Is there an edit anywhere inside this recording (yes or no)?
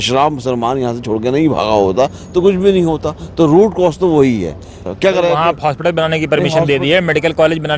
yes